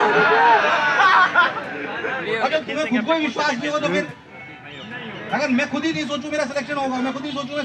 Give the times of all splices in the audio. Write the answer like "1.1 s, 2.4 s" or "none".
none